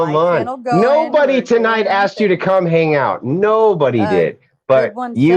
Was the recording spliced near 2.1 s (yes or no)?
no